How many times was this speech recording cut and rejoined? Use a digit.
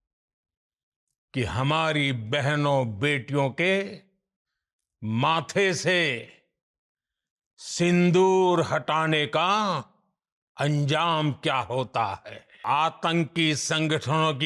1